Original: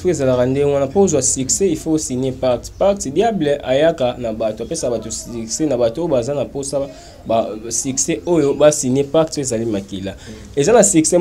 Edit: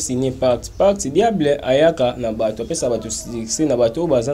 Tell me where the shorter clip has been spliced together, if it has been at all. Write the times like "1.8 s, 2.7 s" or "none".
none